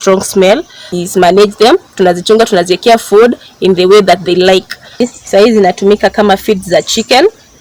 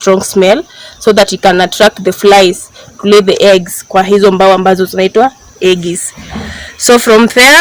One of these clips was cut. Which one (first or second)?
first